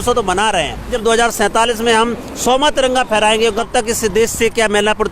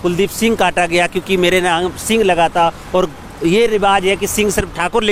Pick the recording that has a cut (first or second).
first